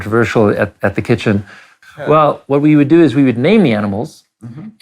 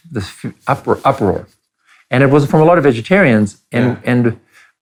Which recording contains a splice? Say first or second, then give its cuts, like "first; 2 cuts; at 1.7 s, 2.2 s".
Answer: first; 1 cut; at 1.8 s